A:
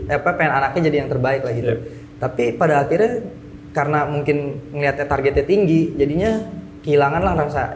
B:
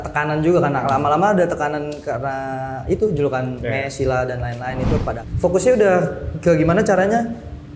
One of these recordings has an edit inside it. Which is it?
B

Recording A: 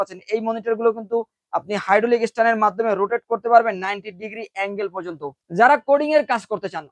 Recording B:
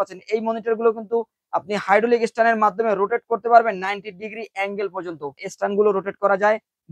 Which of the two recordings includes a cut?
B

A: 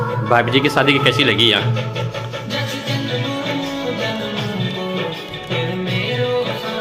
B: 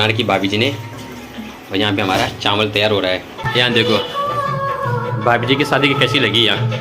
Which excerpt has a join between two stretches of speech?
B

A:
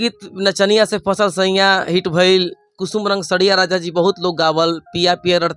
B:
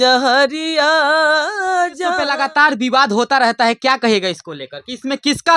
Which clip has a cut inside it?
B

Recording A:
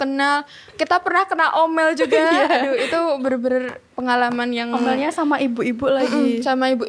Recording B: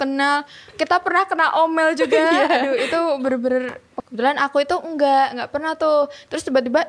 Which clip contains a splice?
B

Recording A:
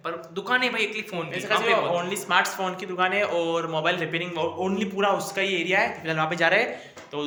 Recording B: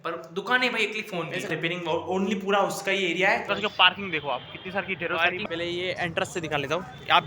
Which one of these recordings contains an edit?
B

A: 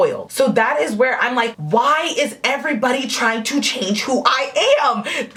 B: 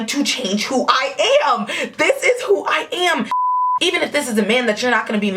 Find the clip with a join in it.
B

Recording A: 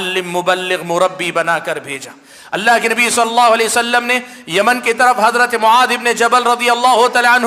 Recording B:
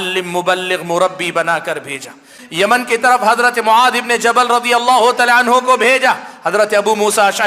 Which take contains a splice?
B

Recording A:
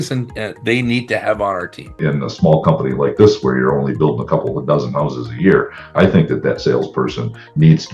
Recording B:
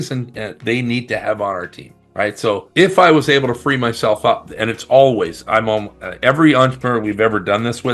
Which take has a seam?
A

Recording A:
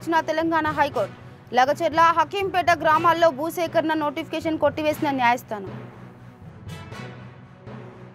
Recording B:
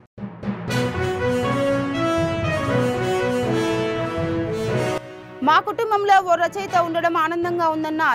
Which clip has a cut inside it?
B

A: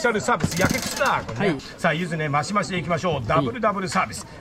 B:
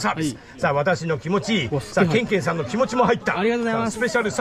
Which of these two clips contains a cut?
A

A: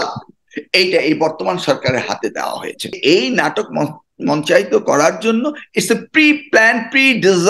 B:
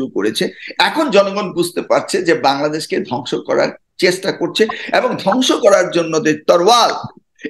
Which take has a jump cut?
A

